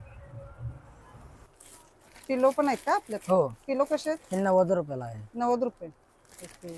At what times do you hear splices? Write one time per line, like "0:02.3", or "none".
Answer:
0:01.4